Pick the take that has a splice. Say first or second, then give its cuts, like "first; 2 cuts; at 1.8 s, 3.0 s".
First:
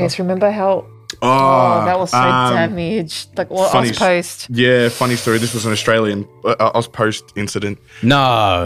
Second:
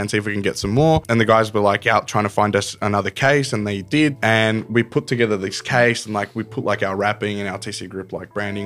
second; 2 cuts; at 1.0 s, 4.1 s